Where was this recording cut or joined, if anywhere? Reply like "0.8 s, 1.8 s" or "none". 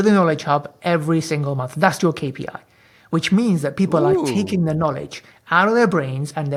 none